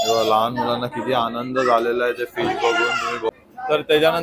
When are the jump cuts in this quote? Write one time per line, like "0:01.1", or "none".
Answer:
0:03.3